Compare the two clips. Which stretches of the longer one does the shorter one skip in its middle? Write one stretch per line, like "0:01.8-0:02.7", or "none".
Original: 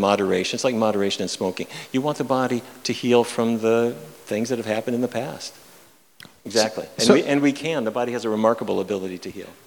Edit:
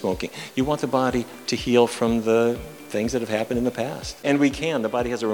0:05.6-0:07.3